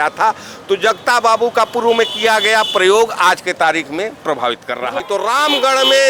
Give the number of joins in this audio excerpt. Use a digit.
1